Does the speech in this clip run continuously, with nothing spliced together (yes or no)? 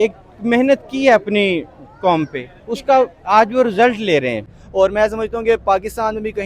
no